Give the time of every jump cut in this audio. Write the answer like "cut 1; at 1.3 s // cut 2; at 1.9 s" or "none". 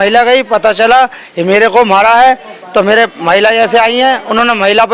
none

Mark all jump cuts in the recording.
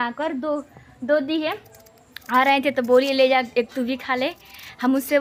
none

